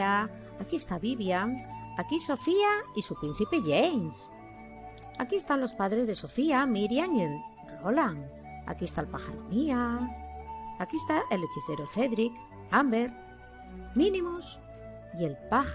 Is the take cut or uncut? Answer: uncut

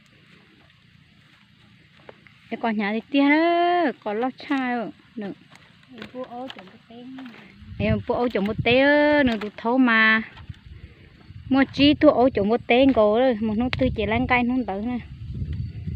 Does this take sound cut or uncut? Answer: uncut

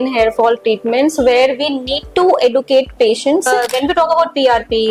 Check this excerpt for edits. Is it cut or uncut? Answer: cut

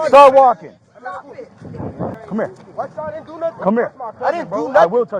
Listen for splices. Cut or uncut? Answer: cut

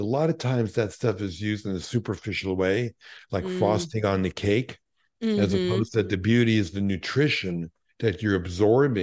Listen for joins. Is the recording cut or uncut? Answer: uncut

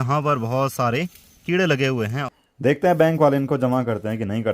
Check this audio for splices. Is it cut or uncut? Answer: cut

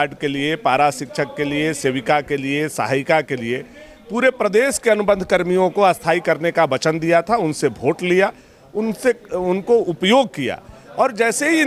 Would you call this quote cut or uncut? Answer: uncut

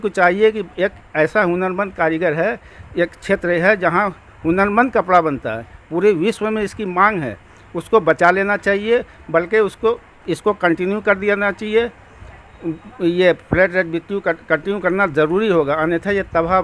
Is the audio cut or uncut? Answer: uncut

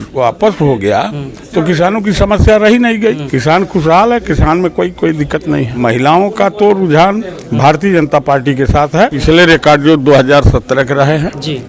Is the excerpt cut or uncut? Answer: cut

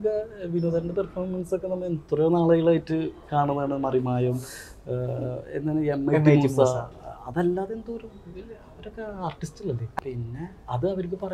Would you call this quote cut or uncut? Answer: cut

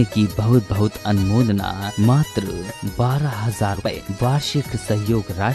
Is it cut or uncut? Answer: cut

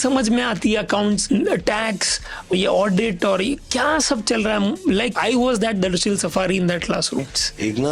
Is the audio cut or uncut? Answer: cut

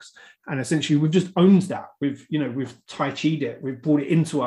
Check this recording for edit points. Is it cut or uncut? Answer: cut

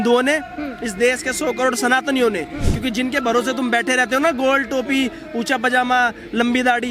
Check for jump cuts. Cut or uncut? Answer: uncut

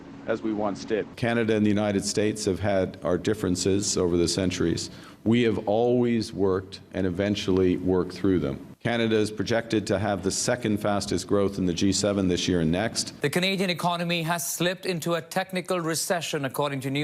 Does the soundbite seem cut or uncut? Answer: cut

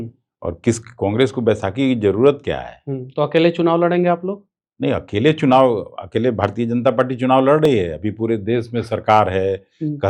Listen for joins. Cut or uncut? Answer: uncut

